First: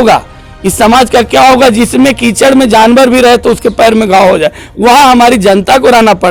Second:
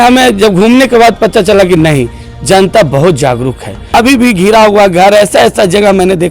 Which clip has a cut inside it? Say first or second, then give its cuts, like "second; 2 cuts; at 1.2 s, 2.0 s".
second; 1 cut; at 3.8 s